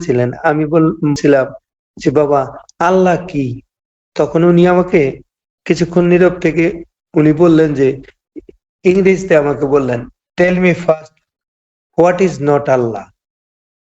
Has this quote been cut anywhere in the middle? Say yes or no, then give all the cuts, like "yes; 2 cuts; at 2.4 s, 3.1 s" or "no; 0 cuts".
yes; 1 cut; at 1.2 s